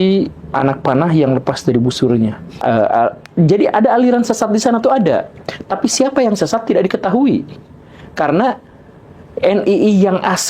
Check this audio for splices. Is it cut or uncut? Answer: cut